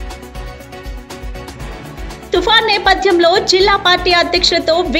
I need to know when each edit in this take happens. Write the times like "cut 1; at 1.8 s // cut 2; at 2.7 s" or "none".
cut 1; at 1.6 s